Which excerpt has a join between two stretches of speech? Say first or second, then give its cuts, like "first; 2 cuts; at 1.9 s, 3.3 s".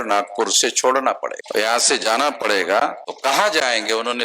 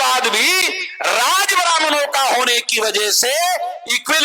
first; 2 cuts; at 1.4 s, 3.1 s